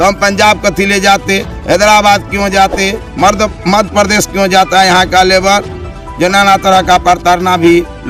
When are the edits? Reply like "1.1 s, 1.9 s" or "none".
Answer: none